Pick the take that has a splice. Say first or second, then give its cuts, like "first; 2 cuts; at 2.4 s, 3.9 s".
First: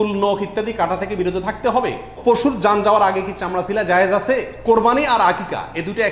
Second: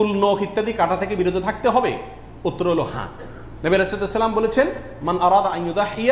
first; 2 cuts; at 2.1 s, 4.5 s